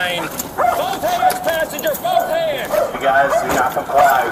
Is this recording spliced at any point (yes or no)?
no